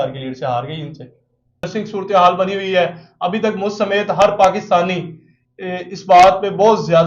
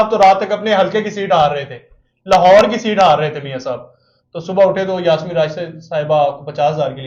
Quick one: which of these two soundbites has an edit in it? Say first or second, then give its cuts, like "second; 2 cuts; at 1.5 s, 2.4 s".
first; 1 cut; at 1.7 s